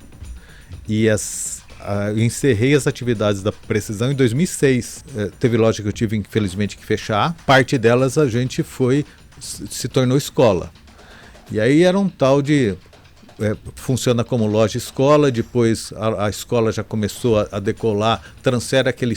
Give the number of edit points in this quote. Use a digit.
2